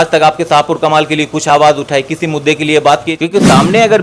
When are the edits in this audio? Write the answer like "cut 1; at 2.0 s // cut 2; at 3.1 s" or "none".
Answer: cut 1; at 3.1 s